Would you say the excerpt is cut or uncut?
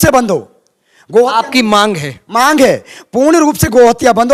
uncut